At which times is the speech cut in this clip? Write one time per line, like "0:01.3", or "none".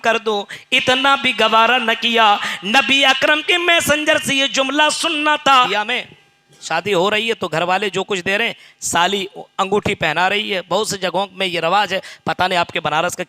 0:05.7